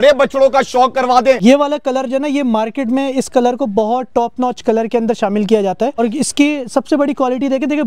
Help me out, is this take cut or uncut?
cut